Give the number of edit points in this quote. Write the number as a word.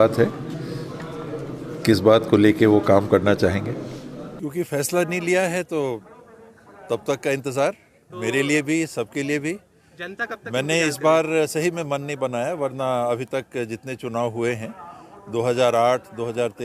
one